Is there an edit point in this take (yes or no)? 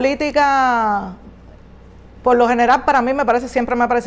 no